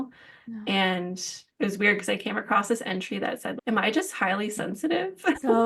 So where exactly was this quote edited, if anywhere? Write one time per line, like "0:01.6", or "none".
0:01.4